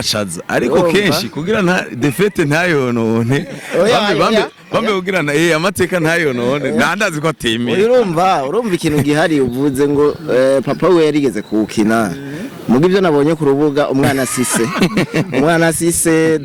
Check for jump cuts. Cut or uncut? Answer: uncut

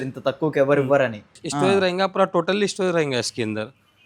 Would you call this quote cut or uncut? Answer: cut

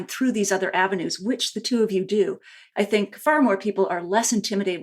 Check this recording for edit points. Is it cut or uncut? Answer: cut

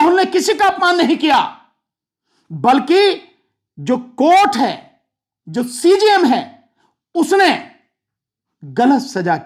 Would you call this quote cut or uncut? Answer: uncut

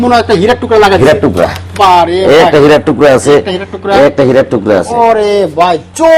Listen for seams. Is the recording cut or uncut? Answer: uncut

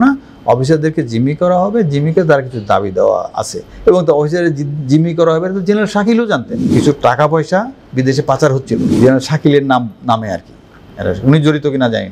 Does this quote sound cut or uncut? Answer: cut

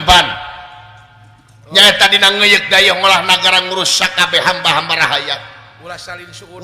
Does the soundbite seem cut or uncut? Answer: uncut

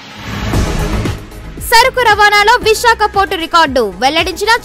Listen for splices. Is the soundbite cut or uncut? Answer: uncut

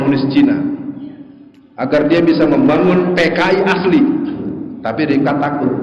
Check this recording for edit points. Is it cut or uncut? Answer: uncut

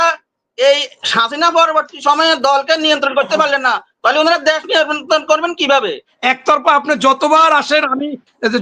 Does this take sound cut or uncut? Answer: cut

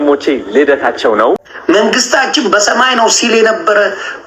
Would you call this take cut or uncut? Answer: cut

